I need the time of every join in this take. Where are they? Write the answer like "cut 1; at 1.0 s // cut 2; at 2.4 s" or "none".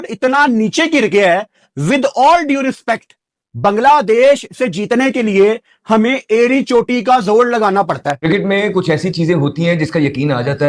cut 1; at 8.2 s